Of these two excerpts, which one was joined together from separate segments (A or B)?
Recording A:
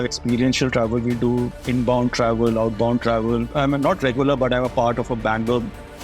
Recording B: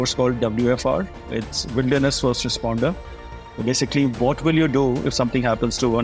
A